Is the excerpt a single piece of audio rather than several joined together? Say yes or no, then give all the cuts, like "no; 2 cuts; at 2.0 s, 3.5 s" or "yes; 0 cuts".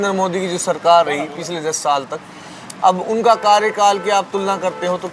yes; 0 cuts